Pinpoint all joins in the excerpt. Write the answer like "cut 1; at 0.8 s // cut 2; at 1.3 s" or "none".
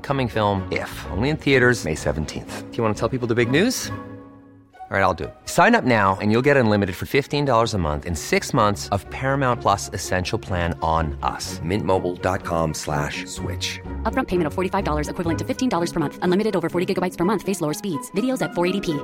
none